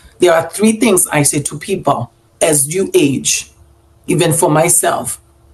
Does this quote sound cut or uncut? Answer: uncut